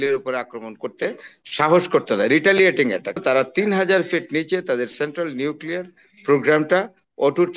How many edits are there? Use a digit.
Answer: 1